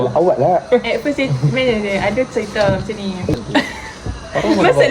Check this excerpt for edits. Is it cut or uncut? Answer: cut